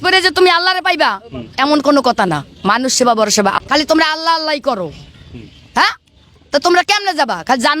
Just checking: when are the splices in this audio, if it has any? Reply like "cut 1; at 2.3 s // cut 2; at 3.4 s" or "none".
cut 1; at 3.6 s